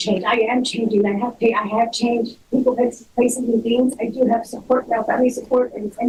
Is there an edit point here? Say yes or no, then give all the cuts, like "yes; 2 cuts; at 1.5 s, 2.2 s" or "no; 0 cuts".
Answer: no; 0 cuts